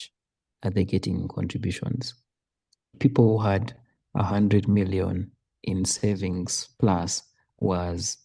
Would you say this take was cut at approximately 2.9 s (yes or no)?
yes